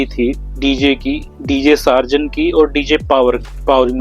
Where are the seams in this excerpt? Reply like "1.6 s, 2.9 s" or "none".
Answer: none